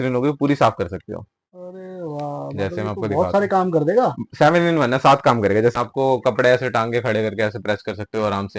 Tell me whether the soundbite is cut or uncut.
cut